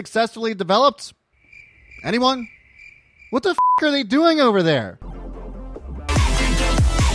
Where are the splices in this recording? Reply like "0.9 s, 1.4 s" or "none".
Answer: 3.1 s